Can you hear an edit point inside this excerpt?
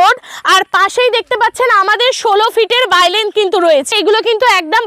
yes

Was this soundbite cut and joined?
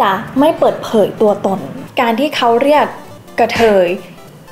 yes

